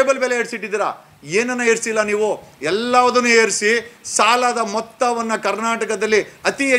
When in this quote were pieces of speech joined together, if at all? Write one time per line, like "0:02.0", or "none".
none

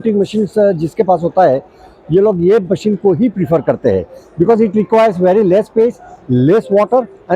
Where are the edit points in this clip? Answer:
none

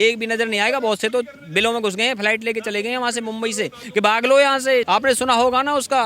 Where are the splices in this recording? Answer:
0:04.9

